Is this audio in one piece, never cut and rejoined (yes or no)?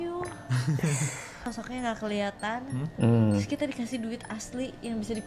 no